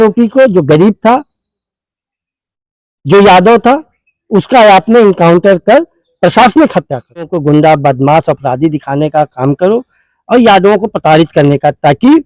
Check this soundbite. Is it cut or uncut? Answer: cut